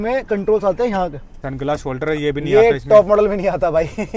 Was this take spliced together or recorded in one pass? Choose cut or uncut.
cut